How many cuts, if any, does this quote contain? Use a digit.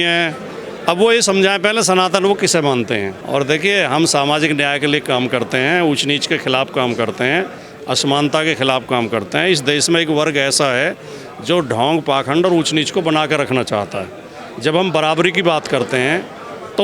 1